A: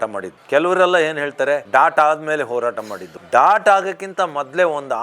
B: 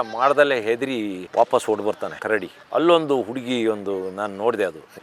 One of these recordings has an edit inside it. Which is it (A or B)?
A